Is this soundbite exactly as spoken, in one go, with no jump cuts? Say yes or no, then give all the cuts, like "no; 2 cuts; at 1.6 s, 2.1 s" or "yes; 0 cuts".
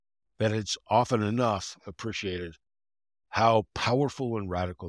yes; 0 cuts